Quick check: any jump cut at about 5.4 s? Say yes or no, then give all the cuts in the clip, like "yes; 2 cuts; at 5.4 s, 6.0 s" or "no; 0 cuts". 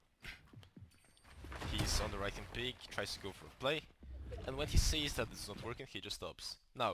yes; 1 cut; at 5.4 s